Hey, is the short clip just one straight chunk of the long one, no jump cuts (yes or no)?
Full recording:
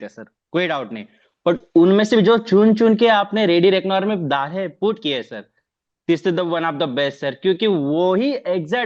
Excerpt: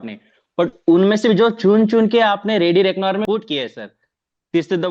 no